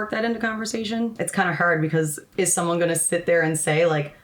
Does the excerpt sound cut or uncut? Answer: cut